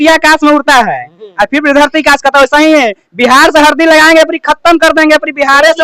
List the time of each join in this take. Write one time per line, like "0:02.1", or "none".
none